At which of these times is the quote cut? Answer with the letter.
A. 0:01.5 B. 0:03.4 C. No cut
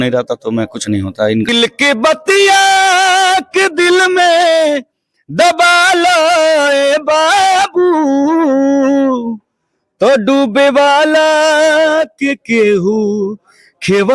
A